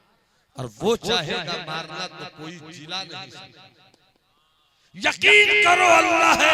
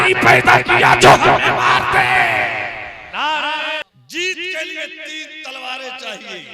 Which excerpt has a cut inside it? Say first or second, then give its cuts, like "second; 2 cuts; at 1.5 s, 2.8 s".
second; 1 cut; at 3.9 s